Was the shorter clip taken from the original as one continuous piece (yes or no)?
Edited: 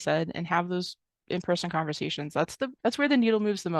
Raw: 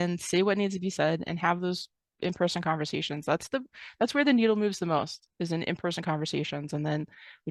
no